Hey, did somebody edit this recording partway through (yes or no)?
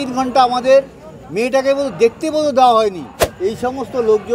yes